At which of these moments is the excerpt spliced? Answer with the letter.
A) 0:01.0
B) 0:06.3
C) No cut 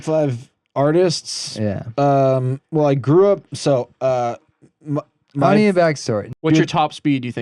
B